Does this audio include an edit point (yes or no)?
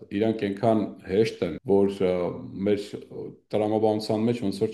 yes